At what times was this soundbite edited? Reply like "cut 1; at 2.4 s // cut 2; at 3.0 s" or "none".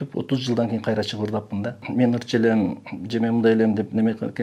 cut 1; at 1.8 s

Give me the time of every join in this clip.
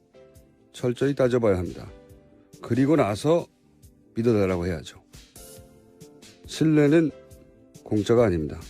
cut 1; at 2.9 s

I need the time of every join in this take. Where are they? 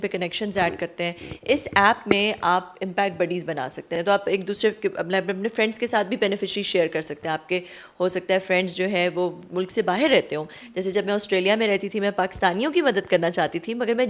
none

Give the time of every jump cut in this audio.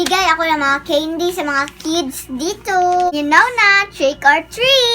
cut 1; at 3.1 s

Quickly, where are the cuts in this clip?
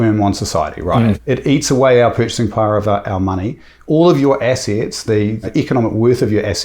cut 1; at 1.2 s // cut 2; at 5.5 s

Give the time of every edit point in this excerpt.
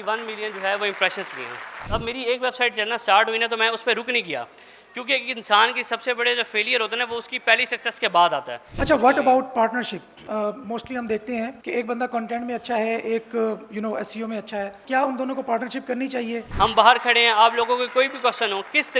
cut 1; at 1.8 s // cut 2; at 8.6 s // cut 3; at 11.6 s // cut 4; at 14.8 s // cut 5; at 16.4 s

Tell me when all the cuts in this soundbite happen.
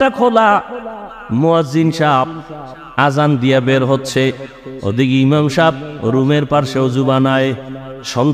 none

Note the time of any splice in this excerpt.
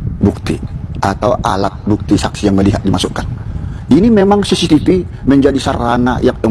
none

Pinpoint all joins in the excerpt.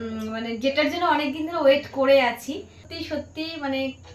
cut 1; at 2.9 s

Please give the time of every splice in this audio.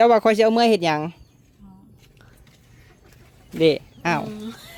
none

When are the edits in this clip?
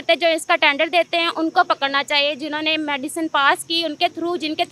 none

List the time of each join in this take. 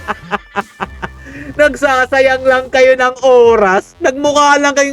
none

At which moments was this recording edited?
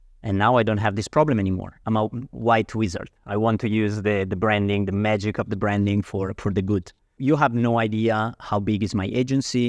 cut 1; at 1.7 s // cut 2; at 7.1 s

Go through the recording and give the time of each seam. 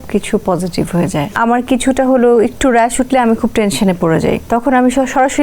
cut 1; at 1.4 s // cut 2; at 4.4 s

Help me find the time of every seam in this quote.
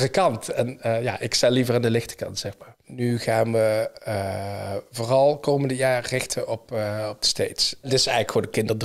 cut 1; at 2.8 s // cut 2; at 7.9 s

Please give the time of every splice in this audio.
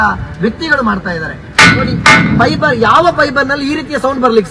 cut 1; at 1.4 s

